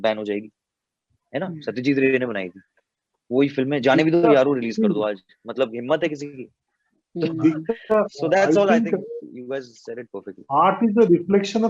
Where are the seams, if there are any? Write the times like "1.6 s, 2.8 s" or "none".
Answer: none